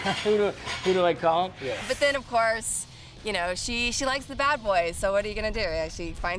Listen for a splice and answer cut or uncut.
cut